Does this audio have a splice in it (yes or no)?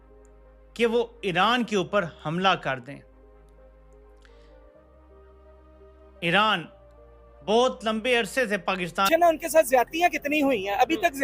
yes